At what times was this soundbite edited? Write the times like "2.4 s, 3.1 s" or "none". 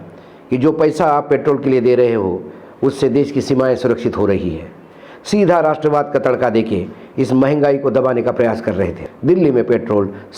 9.1 s